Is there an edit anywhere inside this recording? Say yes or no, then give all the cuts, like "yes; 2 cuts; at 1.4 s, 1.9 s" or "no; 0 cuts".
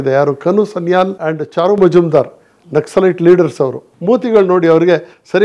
yes; 2 cuts; at 1.2 s, 3.8 s